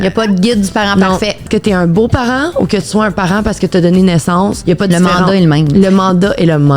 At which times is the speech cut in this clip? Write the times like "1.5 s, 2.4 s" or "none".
1.4 s, 4.6 s

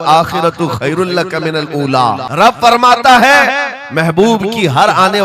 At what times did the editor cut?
2.2 s

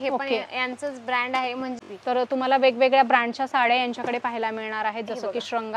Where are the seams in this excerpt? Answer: 1.8 s

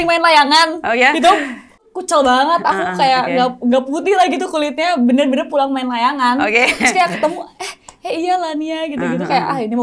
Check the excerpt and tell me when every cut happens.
1.9 s

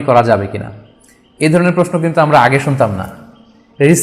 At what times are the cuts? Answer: none

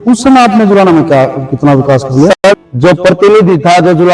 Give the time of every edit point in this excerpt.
2.3 s

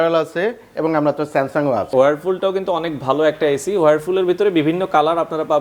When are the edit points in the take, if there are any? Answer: 1.9 s

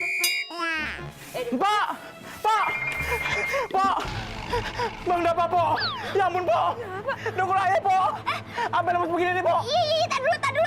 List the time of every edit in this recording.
1.2 s

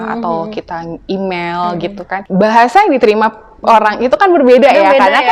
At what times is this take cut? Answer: 2.2 s

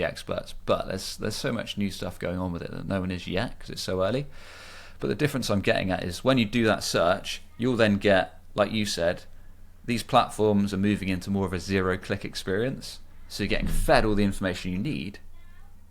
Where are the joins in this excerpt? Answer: none

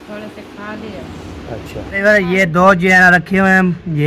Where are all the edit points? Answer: 2.0 s

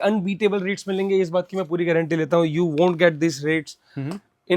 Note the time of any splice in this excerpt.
none

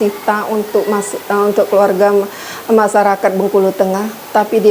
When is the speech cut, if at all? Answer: none

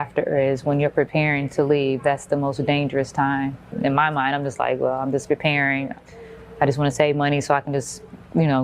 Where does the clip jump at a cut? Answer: 3.7 s

